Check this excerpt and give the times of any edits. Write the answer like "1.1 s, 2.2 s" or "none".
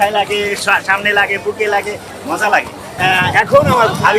2.8 s